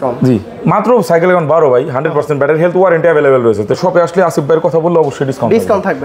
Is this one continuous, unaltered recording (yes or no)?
no